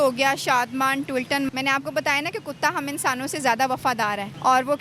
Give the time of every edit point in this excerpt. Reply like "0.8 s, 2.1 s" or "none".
1.5 s